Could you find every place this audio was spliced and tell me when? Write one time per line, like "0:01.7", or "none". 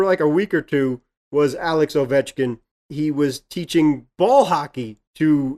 0:02.9